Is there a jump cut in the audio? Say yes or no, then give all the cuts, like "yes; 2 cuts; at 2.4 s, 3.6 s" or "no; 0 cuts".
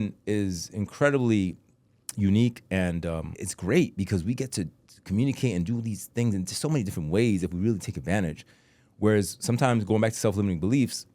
yes; 1 cut; at 3.3 s